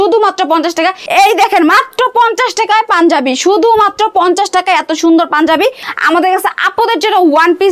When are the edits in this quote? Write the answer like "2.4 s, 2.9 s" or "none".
1.0 s, 5.9 s